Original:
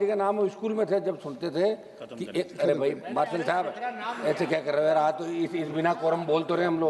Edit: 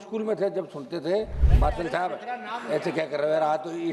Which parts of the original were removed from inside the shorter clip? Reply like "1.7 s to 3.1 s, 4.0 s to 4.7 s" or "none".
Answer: 2.0 s to 3.0 s

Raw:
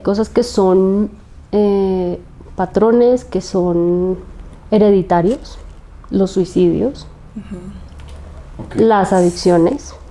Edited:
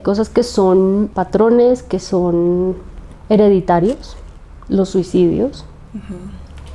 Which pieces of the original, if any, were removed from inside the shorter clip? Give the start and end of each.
1.2 s to 2.6 s

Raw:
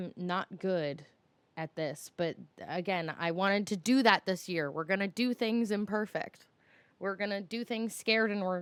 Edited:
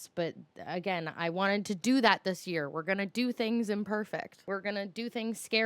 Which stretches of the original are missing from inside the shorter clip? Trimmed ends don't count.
6.4 s to 6.9 s

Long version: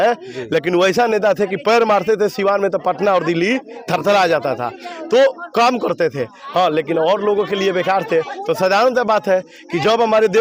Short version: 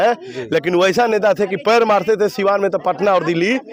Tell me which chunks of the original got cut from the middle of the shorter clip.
none

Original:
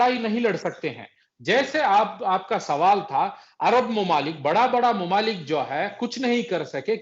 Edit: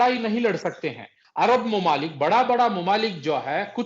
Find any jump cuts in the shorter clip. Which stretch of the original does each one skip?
1.2 s to 3.4 s

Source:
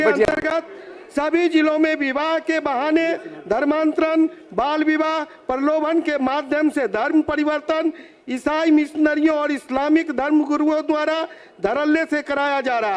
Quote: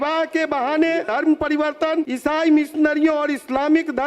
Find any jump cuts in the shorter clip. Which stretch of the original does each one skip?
3.2 s to 7.0 s, 8.0 s to 8.3 s

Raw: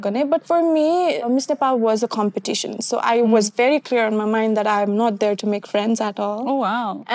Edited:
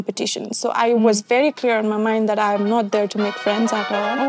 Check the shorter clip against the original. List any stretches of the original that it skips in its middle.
none

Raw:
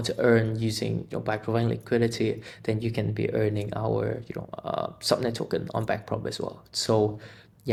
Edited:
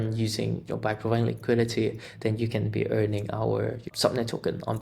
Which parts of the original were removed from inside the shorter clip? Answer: 4.3 s to 5.0 s

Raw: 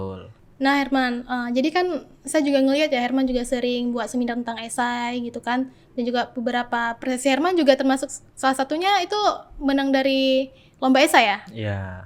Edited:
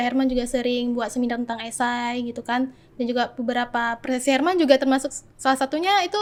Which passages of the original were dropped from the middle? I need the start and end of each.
none

